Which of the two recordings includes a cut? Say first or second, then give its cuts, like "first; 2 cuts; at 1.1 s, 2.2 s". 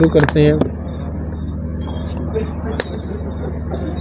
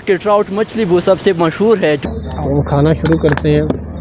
second; 1 cut; at 2.0 s